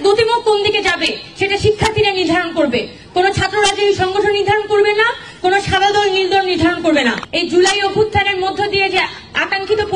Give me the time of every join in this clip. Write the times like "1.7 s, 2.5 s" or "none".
7.3 s